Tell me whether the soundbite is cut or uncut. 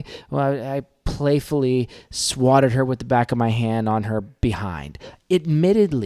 uncut